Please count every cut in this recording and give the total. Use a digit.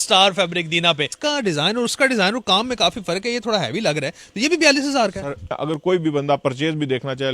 2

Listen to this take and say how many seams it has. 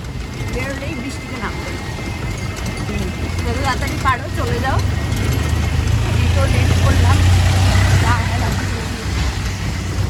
0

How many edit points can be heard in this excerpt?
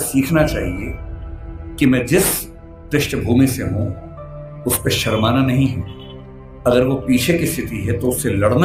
0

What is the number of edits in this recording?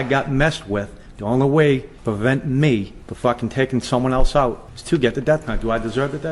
3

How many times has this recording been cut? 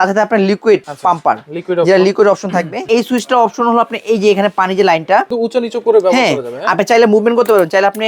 3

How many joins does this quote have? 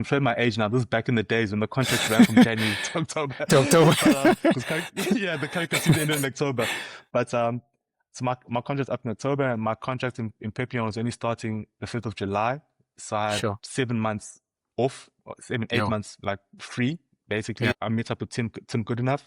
1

